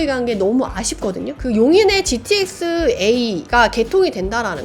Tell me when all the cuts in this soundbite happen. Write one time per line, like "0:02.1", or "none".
0:01.3